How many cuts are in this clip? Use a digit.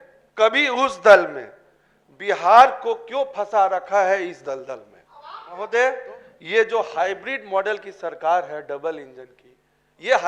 1